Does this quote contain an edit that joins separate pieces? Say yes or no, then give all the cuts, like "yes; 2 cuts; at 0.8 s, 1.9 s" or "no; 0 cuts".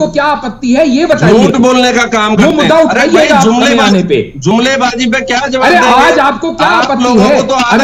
no; 0 cuts